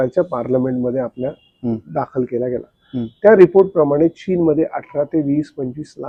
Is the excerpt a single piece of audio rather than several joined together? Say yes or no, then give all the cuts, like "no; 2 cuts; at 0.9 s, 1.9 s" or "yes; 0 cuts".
yes; 0 cuts